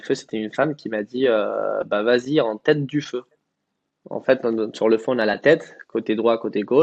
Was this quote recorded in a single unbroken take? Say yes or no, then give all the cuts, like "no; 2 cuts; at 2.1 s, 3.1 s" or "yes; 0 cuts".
yes; 0 cuts